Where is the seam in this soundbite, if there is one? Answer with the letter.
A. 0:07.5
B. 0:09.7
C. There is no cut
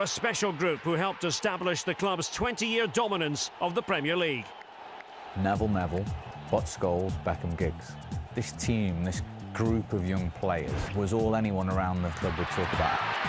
A